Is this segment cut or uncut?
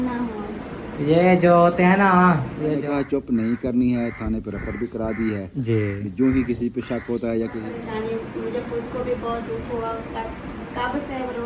cut